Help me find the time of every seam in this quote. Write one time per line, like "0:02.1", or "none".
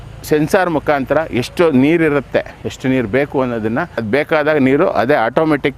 0:04.0